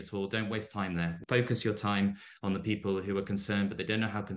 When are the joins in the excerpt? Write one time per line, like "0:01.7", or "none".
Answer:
0:01.2